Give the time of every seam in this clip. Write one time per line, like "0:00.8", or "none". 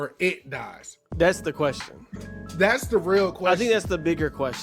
none